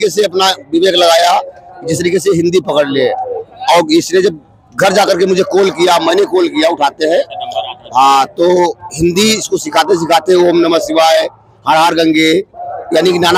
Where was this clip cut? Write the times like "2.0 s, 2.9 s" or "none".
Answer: none